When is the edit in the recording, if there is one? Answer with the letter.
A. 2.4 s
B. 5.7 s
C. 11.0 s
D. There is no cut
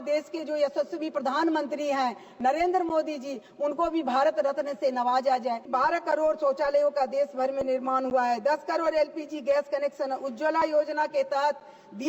B